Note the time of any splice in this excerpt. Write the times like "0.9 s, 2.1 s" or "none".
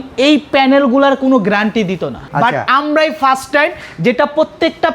2.2 s

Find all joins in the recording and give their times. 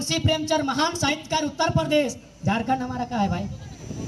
none

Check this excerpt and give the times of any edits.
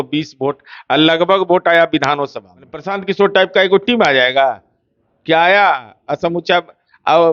2.9 s

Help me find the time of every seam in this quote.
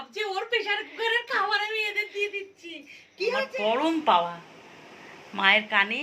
3.3 s

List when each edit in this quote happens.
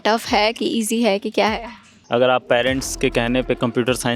1.9 s

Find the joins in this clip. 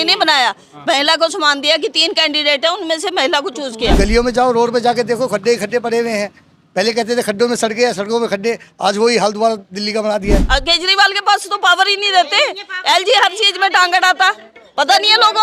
4.0 s, 10.4 s

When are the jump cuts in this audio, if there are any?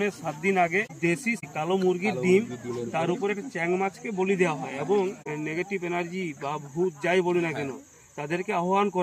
1.5 s, 5.2 s

